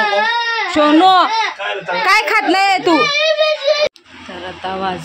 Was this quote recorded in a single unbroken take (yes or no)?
no